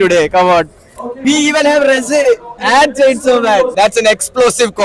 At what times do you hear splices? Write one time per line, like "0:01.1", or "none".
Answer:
0:01.2
0:02.5
0:03.7

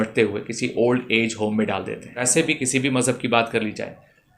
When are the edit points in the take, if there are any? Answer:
0:02.3

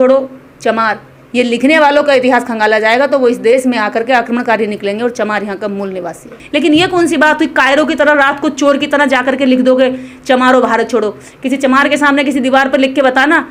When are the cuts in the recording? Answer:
0:06.4

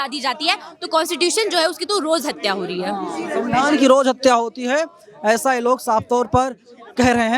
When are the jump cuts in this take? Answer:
none

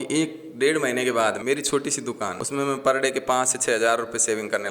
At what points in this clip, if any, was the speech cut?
0:01.4
0:02.4

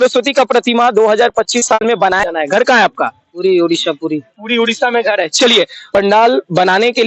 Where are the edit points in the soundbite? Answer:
0:02.2
0:05.8

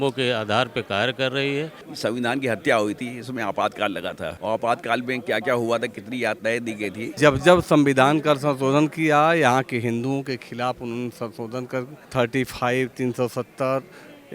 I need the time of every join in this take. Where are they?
0:01.8
0:07.1
0:12.0

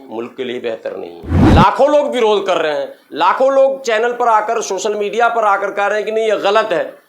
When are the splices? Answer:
0:01.4

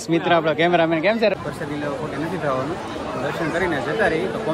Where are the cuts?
0:01.3

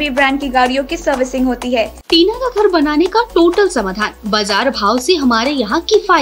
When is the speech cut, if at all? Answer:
0:02.0

